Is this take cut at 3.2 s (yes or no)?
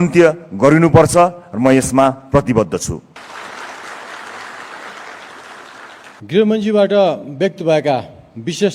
yes